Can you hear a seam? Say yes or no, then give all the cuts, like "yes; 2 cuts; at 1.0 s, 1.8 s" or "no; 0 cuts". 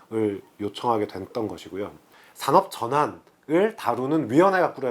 yes; 1 cut; at 2.1 s